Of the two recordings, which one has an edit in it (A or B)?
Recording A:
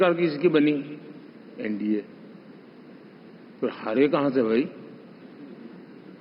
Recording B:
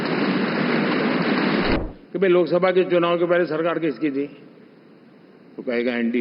B